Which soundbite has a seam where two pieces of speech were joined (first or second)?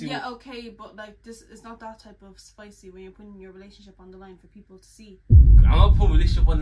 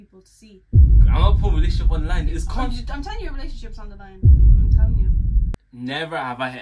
second